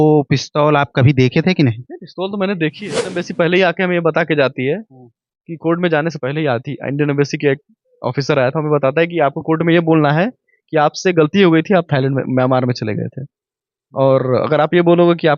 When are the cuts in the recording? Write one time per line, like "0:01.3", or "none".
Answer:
0:03.1